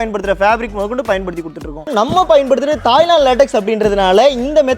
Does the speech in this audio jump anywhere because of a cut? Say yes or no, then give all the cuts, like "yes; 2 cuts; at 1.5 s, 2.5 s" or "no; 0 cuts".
yes; 1 cut; at 1.9 s